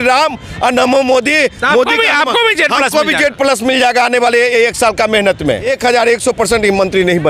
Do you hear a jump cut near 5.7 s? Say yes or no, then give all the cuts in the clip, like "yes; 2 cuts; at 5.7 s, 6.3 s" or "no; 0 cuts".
yes; 1 cut; at 5.7 s